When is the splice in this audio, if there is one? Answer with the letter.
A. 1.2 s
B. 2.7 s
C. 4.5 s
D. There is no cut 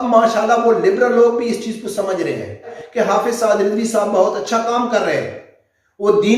B